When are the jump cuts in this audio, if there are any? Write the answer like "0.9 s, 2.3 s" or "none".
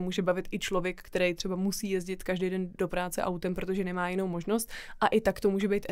none